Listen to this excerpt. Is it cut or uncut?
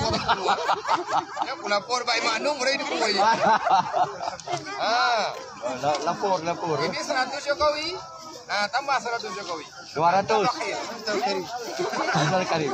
uncut